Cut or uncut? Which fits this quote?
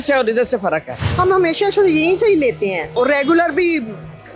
cut